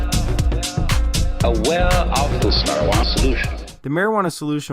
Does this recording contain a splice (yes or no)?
yes